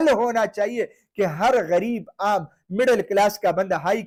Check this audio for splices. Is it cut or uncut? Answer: uncut